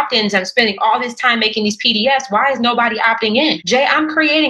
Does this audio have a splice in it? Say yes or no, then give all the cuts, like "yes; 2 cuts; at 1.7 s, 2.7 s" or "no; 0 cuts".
yes; 1 cut; at 3.6 s